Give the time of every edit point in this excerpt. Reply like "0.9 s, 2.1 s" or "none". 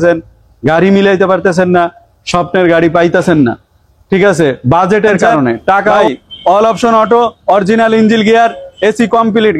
6.0 s